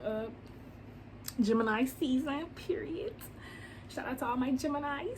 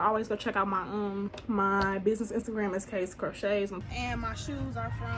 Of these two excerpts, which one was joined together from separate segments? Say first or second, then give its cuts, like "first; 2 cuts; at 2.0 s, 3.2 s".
second; 2 cuts; at 1.4 s, 3.8 s